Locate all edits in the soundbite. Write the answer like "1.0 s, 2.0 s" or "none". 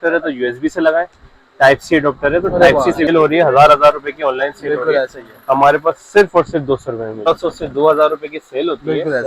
3.1 s, 7.2 s